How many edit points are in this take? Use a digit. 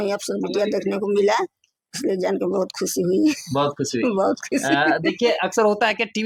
0